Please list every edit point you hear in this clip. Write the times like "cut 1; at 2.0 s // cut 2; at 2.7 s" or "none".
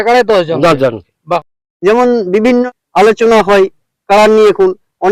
cut 1; at 1.1 s // cut 2; at 2.7 s